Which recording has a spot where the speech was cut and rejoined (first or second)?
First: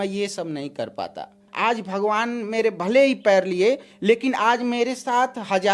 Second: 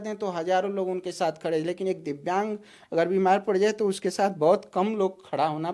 first